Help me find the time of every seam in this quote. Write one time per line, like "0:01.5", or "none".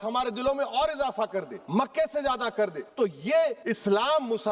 0:01.6
0:02.8
0:03.6

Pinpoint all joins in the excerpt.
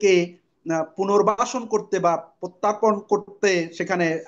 none

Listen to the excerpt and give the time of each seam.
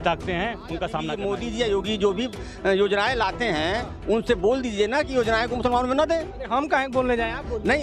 0:01.1

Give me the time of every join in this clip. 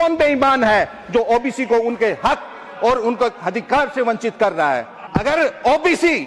0:05.0

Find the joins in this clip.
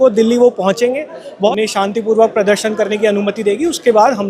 0:01.5

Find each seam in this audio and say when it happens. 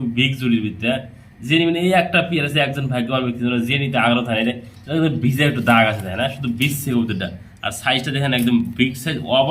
none

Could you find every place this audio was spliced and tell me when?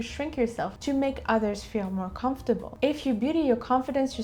none

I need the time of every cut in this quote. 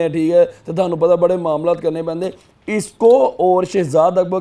none

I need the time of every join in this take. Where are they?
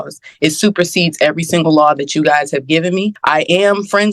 0:03.2

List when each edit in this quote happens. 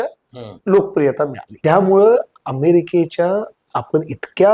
0:01.4

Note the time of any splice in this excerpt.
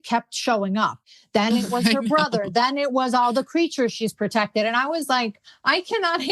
0:01.0

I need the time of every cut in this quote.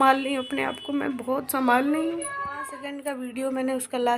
0:02.9

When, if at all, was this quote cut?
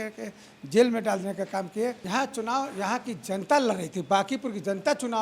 0:02.0

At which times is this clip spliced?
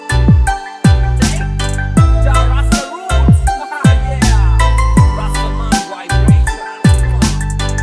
0:06.8

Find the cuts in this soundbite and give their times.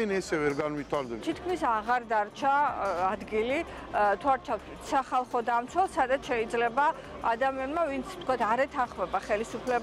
0:01.2

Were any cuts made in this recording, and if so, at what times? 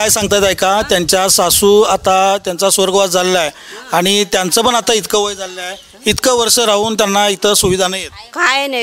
none

